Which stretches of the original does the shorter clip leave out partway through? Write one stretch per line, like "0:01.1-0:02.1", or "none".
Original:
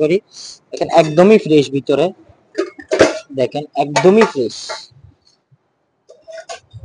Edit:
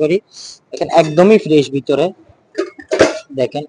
none